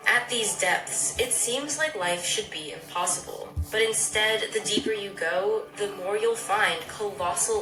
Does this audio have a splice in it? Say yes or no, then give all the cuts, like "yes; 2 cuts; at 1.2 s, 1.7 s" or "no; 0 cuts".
no; 0 cuts